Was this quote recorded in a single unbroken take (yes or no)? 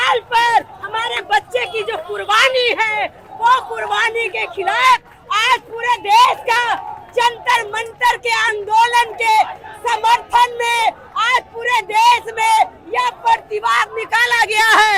yes